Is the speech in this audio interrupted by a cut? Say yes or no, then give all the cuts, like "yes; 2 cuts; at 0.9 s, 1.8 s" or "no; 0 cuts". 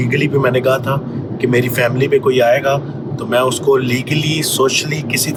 no; 0 cuts